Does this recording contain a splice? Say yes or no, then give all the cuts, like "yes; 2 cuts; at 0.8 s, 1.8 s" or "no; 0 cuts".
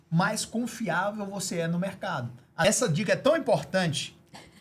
yes; 1 cut; at 2.6 s